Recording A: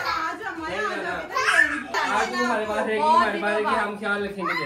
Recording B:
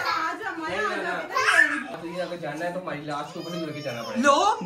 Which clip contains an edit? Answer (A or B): B